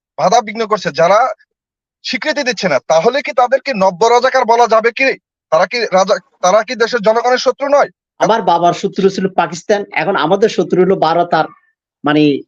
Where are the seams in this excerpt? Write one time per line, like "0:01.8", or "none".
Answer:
0:08.2